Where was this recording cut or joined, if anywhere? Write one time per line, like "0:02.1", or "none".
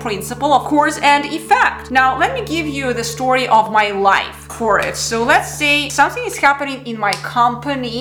none